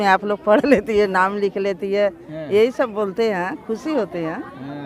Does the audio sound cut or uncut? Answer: uncut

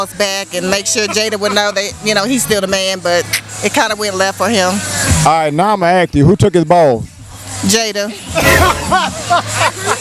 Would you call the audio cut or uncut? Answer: uncut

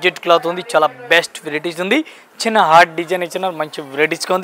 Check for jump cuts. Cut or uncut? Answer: uncut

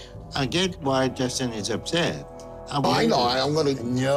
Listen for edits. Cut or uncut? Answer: uncut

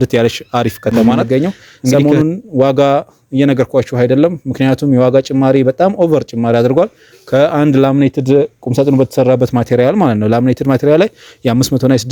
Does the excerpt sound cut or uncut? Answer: cut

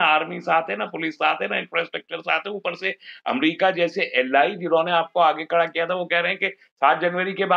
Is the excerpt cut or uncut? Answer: uncut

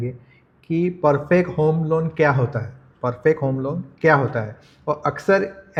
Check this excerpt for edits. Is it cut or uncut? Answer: uncut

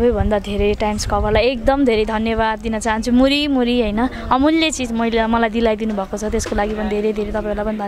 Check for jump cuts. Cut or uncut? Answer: uncut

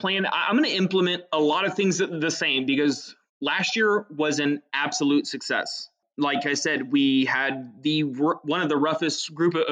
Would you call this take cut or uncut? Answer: cut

